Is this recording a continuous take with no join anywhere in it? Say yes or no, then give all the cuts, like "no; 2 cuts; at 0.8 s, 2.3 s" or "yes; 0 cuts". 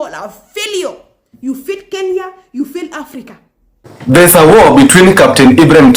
no; 1 cut; at 3.9 s